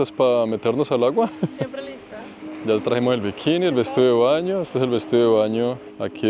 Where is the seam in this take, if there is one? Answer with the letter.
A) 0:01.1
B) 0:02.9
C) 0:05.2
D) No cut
D